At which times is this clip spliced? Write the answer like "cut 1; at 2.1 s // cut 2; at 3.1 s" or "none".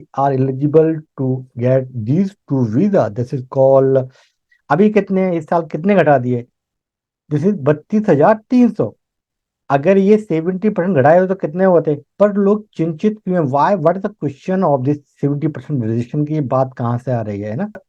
cut 1; at 4.5 s // cut 2; at 12.1 s